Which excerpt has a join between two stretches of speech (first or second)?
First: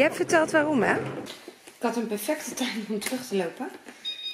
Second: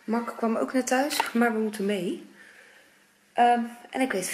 first